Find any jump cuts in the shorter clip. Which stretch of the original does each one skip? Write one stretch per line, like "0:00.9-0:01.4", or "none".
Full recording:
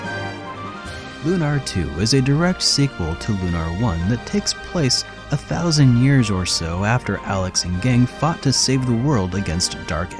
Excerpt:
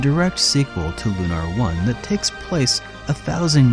none